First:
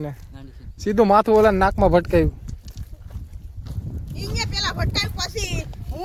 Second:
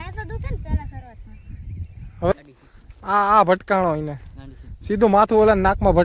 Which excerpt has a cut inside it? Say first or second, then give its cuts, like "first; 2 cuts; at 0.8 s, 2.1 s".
second; 1 cut; at 2.3 s